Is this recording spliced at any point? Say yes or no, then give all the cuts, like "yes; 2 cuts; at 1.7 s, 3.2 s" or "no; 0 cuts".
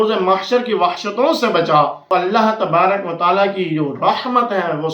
yes; 1 cut; at 2.0 s